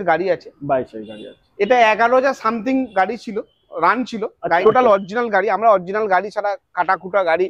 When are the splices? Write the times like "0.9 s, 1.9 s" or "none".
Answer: 4.6 s

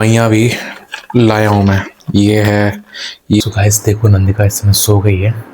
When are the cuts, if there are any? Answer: 3.4 s

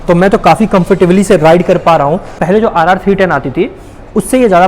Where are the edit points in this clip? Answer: 2.4 s

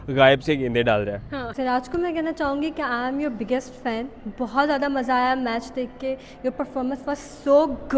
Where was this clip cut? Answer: 1.5 s

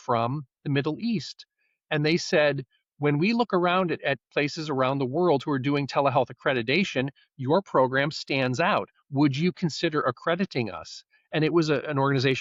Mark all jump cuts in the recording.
none

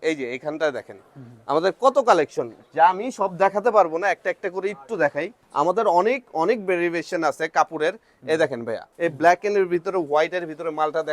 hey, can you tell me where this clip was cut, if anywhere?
5.4 s, 8.8 s

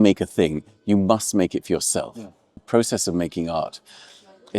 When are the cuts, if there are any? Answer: 2.5 s

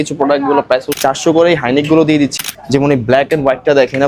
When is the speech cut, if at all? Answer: 1.0 s, 2.3 s

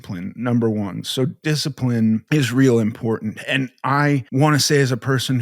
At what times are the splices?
2.2 s, 4.3 s

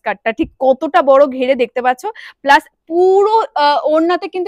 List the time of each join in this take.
none

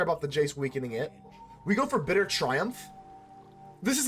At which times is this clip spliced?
1.5 s

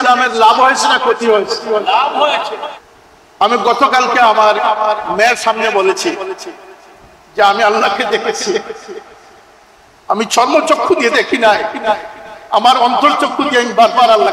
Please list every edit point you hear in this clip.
2.7 s

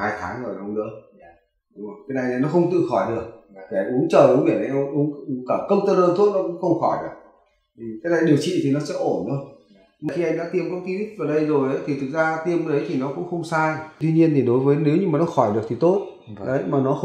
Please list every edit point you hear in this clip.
10.1 s, 13.9 s

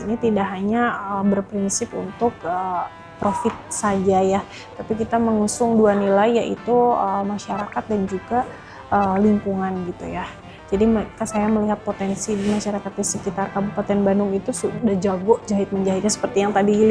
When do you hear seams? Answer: none

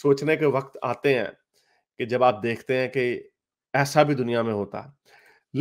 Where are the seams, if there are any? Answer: none

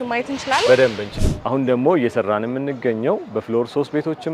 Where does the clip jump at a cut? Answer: 1.1 s

